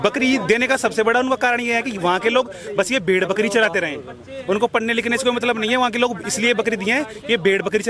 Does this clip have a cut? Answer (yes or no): no